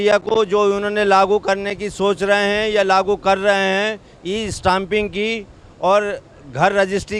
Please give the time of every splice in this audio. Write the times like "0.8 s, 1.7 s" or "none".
none